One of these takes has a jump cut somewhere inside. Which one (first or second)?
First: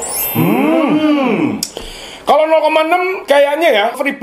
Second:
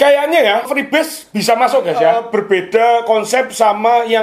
second